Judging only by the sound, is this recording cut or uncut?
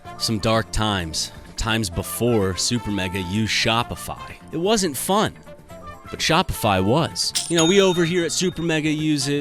cut